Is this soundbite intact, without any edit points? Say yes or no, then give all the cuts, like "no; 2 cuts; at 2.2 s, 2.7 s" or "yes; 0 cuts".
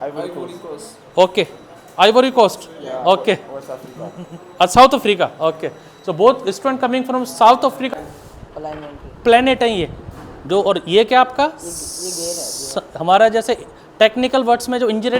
no; 1 cut; at 7.9 s